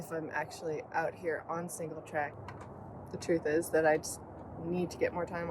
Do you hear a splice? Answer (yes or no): yes